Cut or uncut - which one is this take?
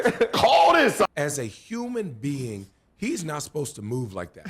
cut